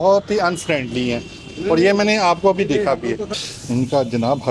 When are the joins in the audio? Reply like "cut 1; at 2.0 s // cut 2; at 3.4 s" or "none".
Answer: cut 1; at 3.4 s